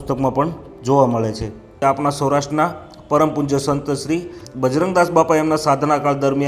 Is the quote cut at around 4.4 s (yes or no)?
no